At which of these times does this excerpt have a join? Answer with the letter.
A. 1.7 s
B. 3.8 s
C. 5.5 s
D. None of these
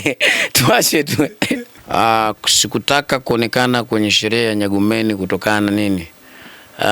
A